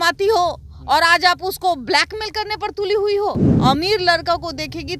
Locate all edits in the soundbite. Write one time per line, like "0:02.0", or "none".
0:03.5